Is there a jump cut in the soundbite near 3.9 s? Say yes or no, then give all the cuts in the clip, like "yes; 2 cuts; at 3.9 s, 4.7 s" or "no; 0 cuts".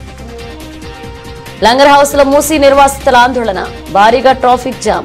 no; 0 cuts